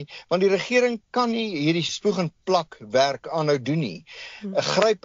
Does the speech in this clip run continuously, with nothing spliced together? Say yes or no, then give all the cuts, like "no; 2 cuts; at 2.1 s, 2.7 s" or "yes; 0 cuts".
no; 1 cut; at 1.9 s